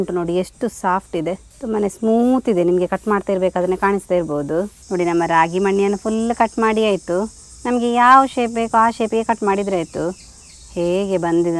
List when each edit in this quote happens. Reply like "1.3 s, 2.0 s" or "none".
1.5 s, 4.8 s